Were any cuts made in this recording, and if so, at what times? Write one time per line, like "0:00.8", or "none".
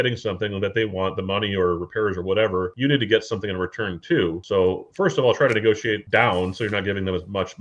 none

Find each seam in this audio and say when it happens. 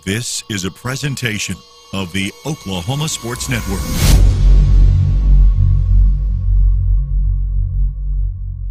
none

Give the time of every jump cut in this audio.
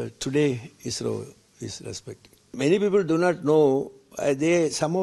0:02.5

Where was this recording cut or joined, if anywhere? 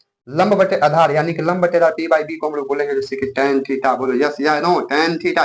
none

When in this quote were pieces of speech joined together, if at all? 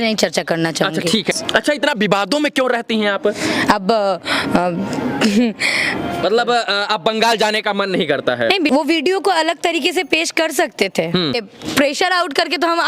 0:01.4
0:06.2
0:08.7
0:11.5

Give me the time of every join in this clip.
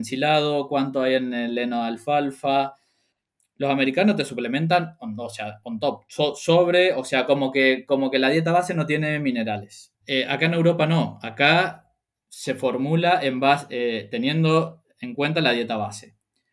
none

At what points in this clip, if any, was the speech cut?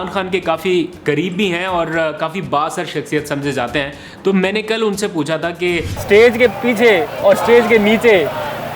0:05.9

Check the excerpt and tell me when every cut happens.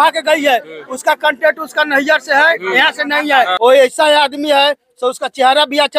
0:03.5

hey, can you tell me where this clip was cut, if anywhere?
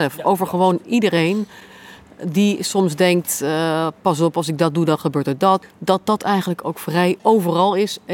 0:05.6
0:07.2

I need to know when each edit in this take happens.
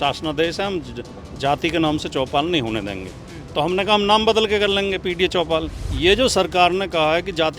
0:05.8

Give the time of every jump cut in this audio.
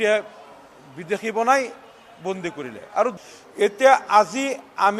0:03.2

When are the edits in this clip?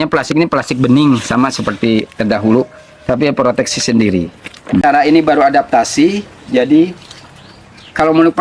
0:04.8

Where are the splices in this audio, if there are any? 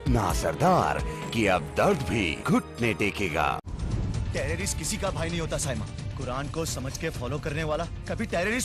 0:03.7

